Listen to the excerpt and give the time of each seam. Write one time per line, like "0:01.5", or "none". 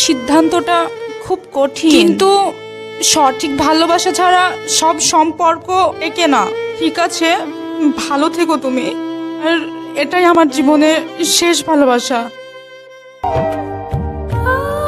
none

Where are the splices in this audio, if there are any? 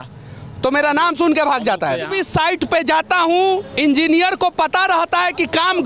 0:02.1

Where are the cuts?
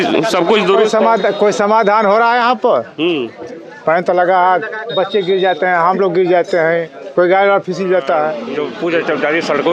0:08.5

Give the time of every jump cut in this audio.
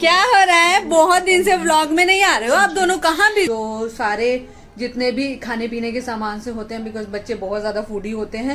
0:03.5

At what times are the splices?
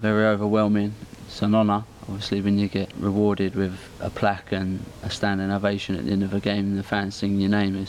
0:01.1
0:02.9

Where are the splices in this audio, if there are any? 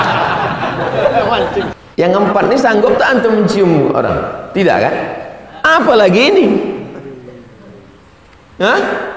0:01.7

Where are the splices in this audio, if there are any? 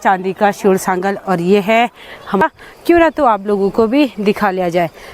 0:02.4

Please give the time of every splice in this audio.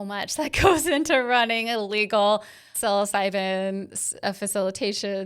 0:02.7

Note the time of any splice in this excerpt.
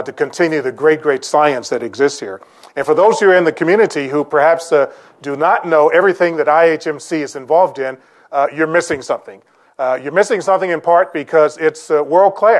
0:08.1

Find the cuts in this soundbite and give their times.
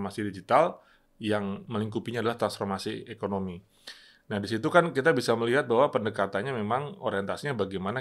none

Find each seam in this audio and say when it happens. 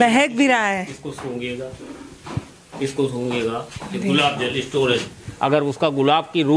0:05.2

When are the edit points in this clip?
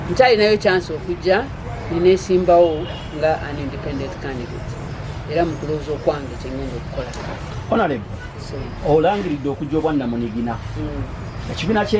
0:07.5

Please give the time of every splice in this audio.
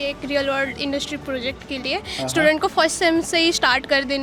none

